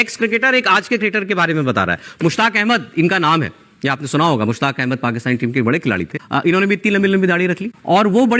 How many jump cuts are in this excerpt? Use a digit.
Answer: 0